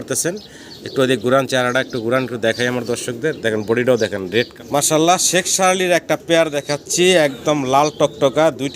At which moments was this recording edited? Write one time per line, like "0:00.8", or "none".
0:04.5

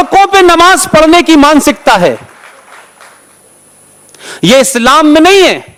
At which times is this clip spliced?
none

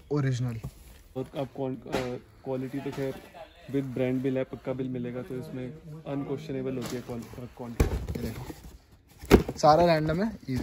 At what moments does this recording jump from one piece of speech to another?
0:01.2
0:07.8

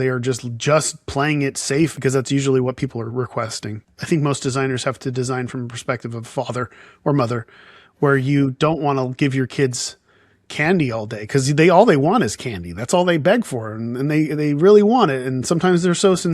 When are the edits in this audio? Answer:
0:02.0
0:03.8

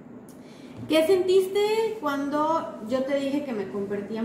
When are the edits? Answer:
none

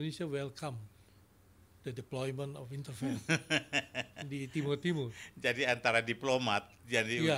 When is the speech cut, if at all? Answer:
none

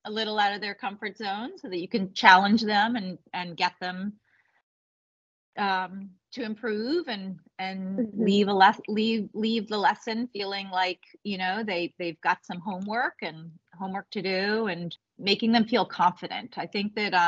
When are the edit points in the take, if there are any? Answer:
0:15.0

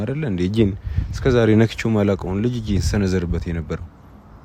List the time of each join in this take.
none

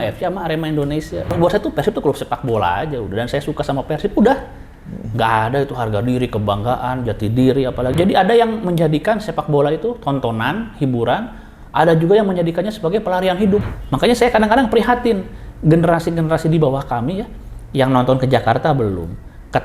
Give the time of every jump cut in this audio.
0:01.3
0:07.9
0:13.8

